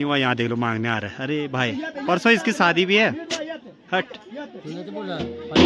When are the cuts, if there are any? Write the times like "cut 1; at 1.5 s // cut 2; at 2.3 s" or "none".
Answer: none

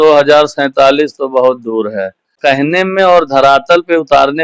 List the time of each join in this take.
cut 1; at 2.4 s

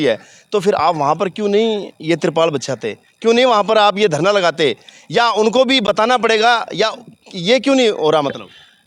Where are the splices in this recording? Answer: none

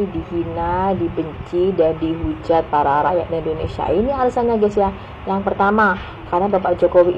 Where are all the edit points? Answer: none

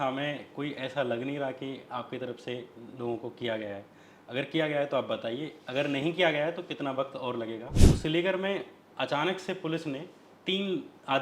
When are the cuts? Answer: cut 1; at 7.8 s

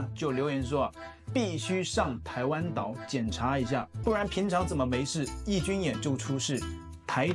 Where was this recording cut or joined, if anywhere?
cut 1; at 3.9 s

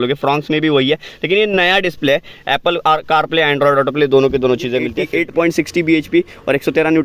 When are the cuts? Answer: cut 1; at 5.0 s

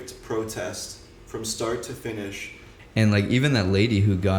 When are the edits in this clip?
cut 1; at 2.7 s

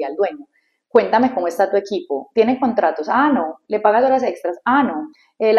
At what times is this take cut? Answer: none

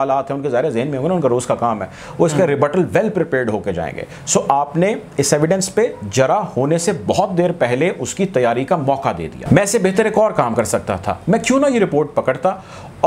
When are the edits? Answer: cut 1; at 9.3 s

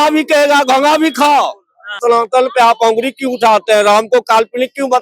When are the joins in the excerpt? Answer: cut 1; at 2.0 s

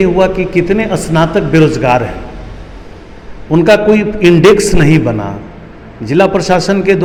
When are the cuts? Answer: none

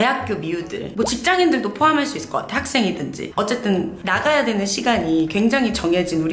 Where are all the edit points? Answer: none

